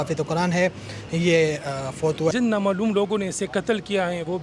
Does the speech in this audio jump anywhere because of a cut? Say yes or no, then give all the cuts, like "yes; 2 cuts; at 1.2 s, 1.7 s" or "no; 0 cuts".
yes; 1 cut; at 2.3 s